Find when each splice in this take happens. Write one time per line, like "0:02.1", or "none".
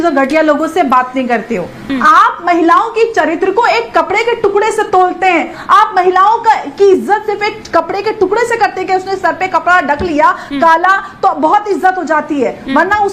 0:01.8
0:05.6